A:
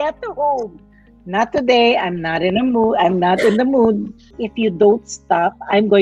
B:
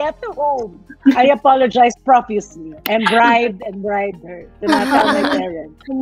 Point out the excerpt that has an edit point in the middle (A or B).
A